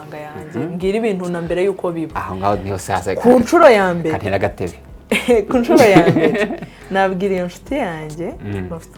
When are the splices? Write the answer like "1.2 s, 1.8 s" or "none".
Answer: none